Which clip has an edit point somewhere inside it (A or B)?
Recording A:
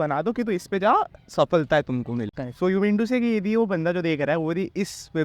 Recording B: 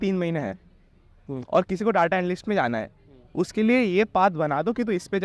A